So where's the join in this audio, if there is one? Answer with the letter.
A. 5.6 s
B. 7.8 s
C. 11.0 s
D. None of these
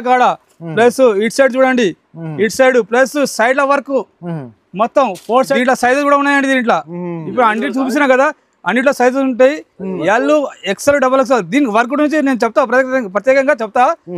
A